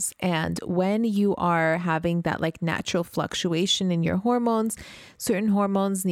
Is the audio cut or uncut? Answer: uncut